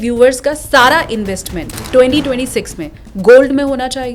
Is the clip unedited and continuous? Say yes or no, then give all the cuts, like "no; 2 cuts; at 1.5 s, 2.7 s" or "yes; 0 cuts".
yes; 0 cuts